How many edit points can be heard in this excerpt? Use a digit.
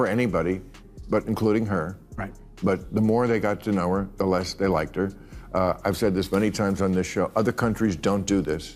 1